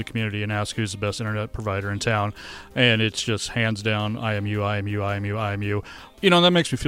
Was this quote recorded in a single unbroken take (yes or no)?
no